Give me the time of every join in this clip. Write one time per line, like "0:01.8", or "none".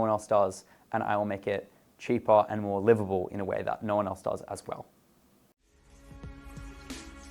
0:05.5